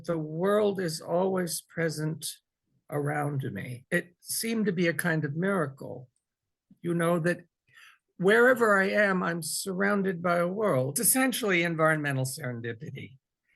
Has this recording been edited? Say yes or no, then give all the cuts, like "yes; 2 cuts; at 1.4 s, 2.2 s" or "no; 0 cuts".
yes; 2 cuts; at 3.8 s, 11.0 s